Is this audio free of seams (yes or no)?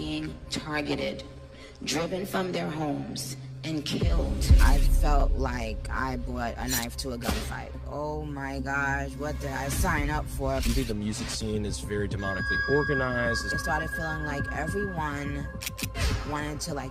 yes